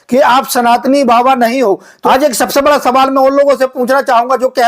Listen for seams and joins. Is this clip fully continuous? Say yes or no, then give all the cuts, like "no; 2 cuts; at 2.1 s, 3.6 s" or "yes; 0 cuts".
no; 1 cut; at 2.0 s